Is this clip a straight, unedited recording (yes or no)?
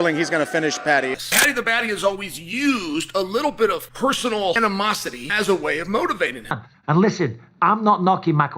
no